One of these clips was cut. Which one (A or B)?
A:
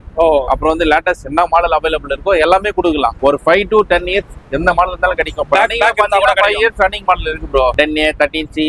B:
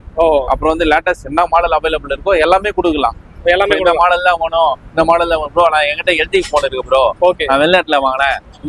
A